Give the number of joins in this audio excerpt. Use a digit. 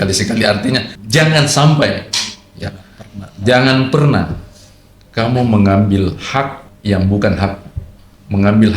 2